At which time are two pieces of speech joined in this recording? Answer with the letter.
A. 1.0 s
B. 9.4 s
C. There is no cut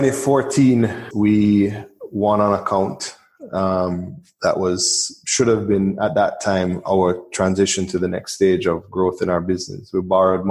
A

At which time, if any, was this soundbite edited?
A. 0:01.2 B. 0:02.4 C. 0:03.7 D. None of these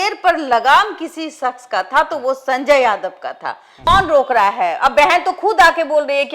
C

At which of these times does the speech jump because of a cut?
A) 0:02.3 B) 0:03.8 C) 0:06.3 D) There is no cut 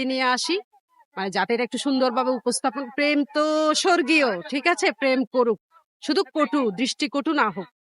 D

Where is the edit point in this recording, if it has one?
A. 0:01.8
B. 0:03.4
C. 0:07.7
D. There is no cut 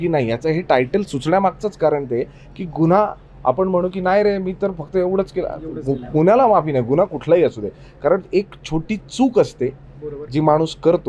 D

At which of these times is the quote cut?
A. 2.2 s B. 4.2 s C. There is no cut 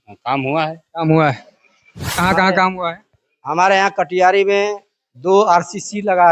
A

